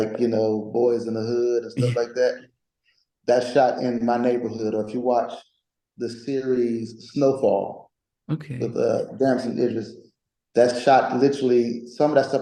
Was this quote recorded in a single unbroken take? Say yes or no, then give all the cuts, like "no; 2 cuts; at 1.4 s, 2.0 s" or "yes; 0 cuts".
yes; 0 cuts